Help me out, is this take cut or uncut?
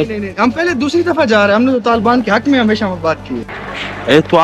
cut